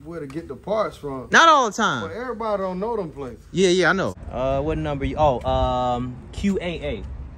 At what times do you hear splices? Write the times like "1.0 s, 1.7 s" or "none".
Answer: 4.2 s